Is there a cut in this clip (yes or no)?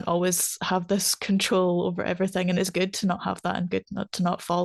no